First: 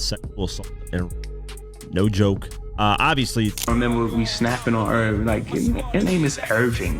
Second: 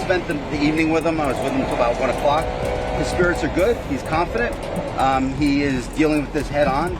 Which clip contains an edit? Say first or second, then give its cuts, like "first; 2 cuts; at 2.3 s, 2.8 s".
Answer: first; 1 cut; at 3.6 s